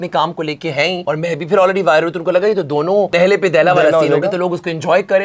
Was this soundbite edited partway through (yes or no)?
yes